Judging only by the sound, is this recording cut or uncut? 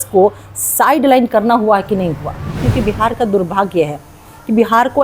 cut